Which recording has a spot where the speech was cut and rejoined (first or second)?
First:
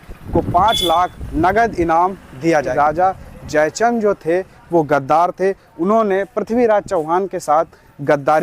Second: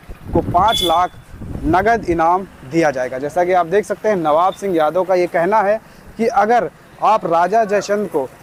first